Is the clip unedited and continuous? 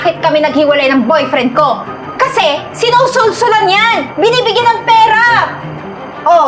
yes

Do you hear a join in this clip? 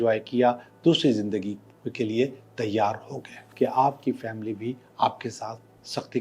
yes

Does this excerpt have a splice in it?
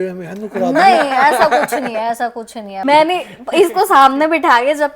yes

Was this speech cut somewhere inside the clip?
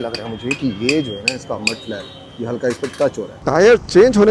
yes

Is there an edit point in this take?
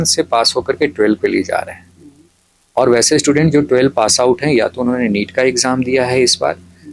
no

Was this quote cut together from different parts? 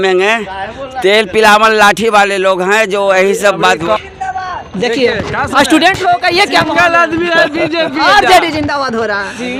no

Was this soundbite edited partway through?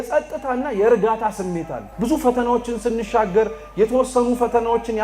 yes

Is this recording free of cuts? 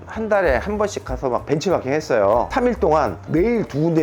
no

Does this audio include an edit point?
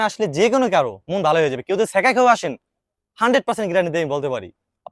no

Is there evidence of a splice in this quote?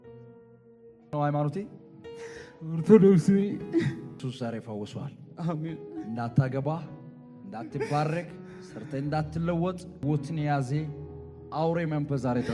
yes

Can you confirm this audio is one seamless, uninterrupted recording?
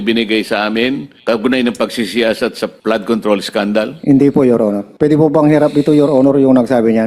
no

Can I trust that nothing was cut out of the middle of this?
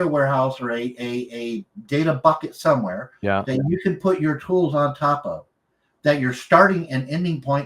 yes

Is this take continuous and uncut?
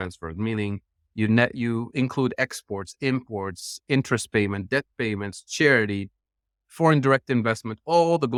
yes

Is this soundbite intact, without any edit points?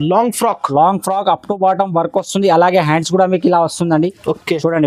yes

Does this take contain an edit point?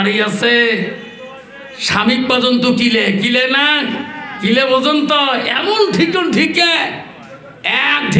no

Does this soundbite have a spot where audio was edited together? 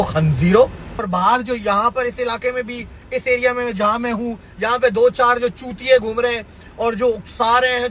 yes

